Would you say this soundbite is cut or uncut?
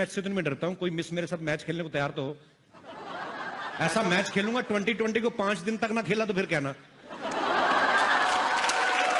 uncut